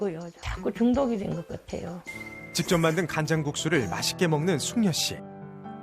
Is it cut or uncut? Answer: cut